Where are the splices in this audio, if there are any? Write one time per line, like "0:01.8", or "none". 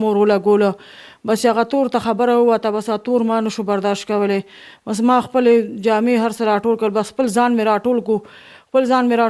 none